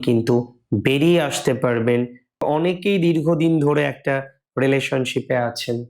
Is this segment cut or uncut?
cut